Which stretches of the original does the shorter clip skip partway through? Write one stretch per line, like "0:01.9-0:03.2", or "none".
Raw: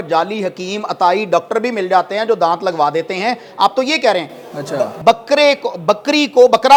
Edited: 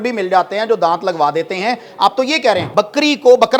0:04.3-0:05.8